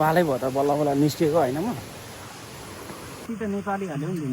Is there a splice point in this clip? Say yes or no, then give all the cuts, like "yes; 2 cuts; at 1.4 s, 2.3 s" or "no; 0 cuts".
yes; 1 cut; at 3.2 s